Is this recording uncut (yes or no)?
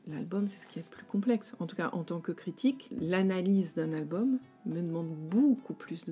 no